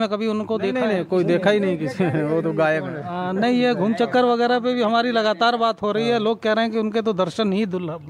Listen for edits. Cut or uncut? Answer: uncut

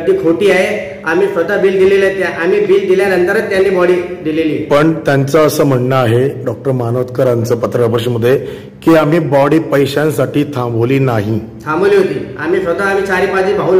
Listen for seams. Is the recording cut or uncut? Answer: uncut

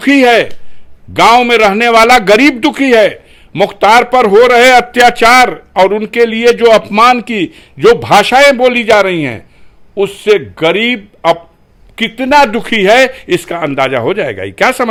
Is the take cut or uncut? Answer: uncut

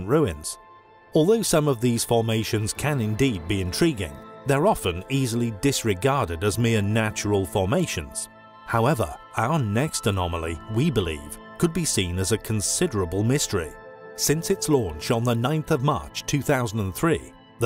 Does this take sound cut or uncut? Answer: cut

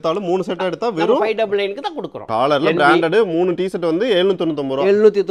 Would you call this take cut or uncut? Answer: cut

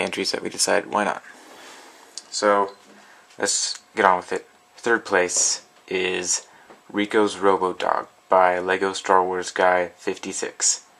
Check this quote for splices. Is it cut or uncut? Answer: cut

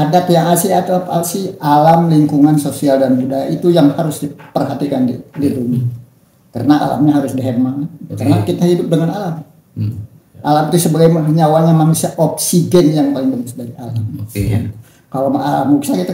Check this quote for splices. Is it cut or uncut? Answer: uncut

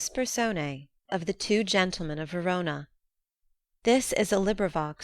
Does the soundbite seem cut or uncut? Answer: cut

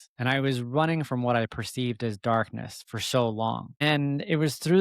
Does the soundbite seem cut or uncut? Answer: cut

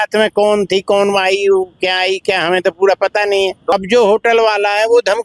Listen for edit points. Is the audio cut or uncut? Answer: cut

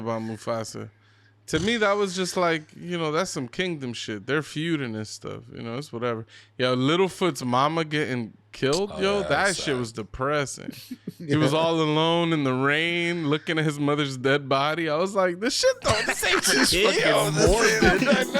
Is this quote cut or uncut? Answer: uncut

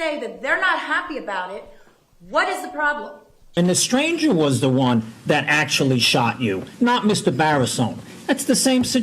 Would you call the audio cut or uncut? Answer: cut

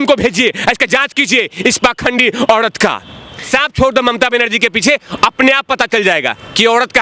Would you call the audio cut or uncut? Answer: cut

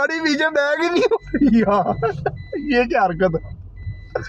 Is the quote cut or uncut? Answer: uncut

